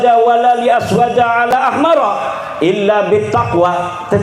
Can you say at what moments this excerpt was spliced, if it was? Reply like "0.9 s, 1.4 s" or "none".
1.5 s